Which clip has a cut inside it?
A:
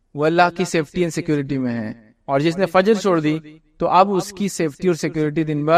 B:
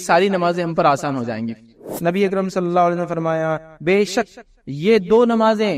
B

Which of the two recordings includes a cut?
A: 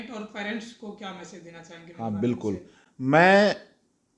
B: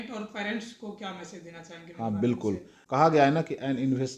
B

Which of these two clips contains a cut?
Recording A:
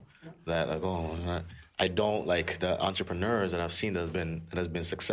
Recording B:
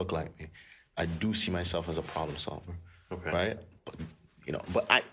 B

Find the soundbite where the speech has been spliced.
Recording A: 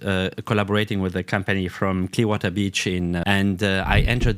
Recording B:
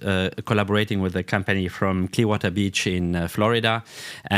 A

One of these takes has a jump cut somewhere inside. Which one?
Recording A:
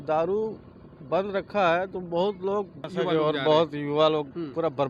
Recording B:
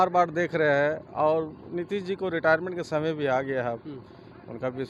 A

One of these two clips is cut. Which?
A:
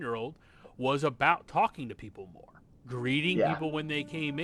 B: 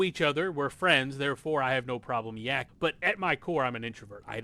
B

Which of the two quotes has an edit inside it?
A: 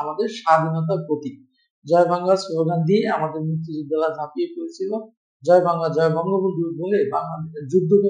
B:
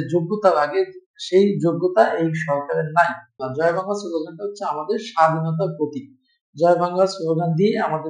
B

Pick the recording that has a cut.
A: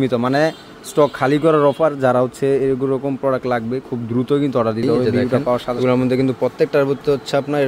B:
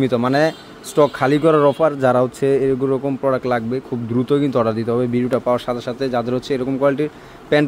A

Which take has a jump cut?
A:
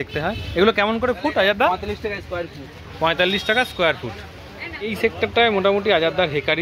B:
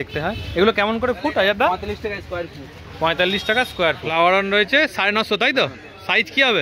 B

